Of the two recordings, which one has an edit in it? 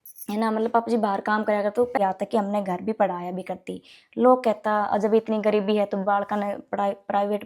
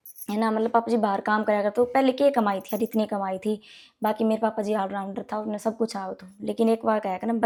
first; 1 cut; at 2.0 s

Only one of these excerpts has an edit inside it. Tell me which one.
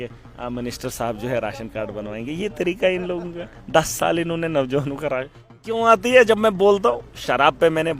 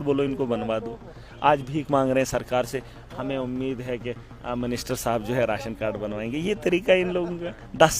first; 1 cut; at 5.7 s

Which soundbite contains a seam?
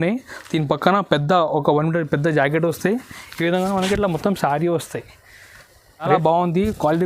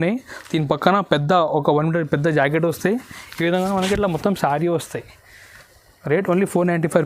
first; 1 cut; at 6.1 s

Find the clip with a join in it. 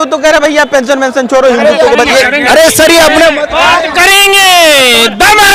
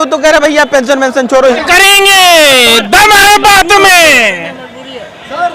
second; 1 cut; at 1.6 s

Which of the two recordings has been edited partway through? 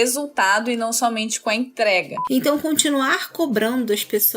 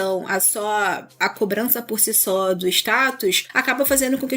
first; 1 cut; at 2.2 s

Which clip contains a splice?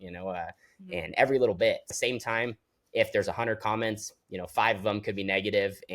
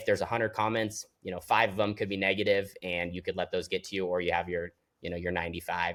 first; 1 cut; at 1.9 s

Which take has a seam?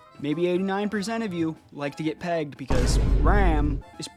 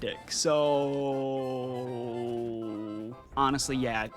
second; 1 cut; at 3.2 s

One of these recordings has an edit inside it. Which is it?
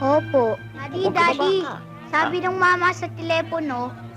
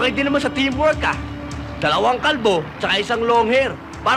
first; 1 cut; at 1.0 s

